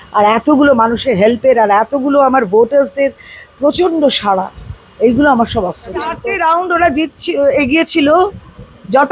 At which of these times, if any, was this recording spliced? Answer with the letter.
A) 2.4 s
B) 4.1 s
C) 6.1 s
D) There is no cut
C